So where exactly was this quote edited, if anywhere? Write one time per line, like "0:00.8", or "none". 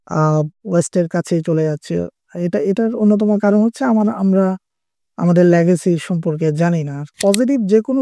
0:07.0